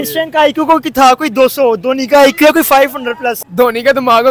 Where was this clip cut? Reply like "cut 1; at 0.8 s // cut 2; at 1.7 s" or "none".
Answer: cut 1; at 3.4 s